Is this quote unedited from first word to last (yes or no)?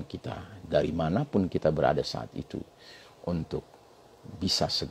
yes